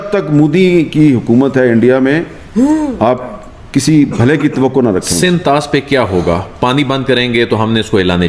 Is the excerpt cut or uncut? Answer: uncut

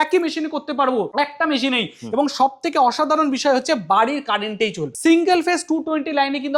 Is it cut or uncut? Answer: cut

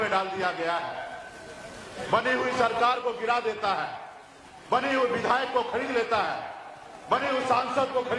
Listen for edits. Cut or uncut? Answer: uncut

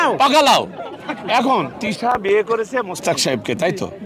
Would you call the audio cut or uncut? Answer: cut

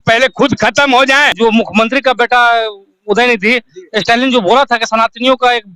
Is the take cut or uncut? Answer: cut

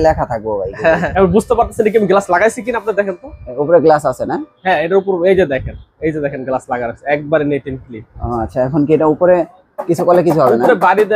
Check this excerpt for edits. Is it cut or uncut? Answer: cut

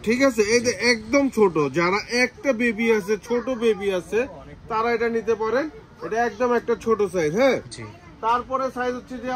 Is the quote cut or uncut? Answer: uncut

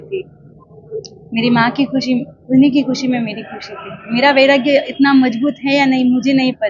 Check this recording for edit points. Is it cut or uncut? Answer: uncut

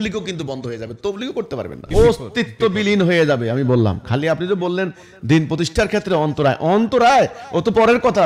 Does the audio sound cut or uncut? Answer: cut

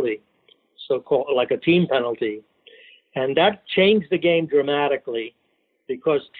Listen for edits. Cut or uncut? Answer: uncut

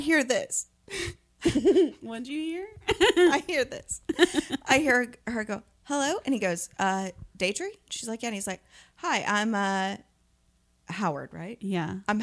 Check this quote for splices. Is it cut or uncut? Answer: uncut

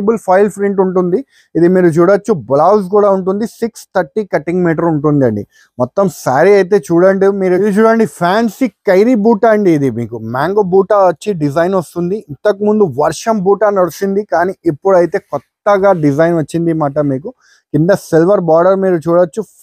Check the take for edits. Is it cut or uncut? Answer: cut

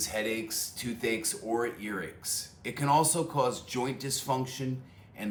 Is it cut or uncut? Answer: uncut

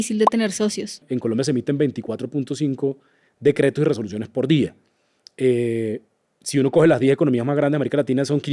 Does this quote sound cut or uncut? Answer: cut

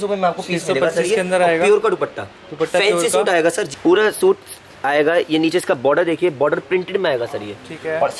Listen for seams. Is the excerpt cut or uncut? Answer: cut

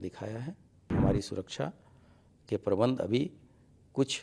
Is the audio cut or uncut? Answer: cut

